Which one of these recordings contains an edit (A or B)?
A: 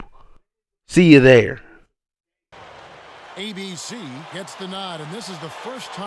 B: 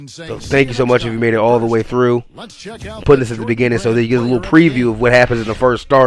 A